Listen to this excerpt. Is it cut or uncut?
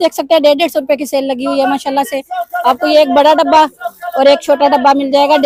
uncut